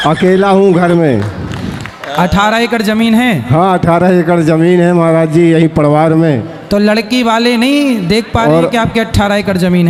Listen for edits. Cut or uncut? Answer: uncut